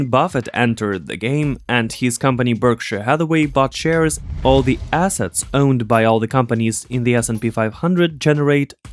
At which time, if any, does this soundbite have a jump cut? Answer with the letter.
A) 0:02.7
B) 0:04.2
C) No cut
B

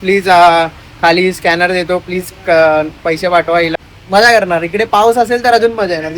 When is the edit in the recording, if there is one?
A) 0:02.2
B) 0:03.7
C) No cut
B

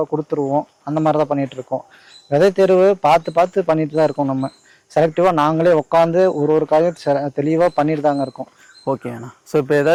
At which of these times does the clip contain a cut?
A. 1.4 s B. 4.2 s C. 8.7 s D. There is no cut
D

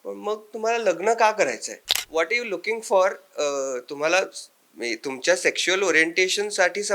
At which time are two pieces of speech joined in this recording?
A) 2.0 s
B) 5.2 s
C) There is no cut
A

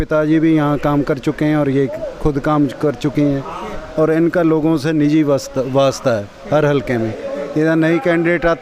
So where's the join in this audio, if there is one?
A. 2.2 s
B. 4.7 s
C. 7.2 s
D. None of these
D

